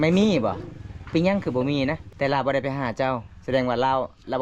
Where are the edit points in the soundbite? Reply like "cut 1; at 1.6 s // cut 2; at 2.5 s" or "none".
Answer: cut 1; at 2.1 s